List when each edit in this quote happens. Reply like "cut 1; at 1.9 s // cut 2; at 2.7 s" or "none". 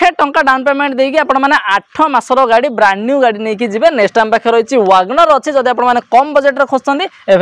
none